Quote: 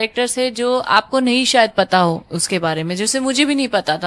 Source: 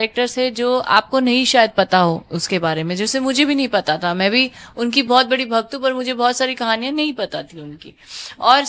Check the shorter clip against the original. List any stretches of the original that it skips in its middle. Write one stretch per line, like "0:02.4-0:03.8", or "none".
none